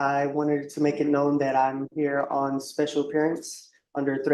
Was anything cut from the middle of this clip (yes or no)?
no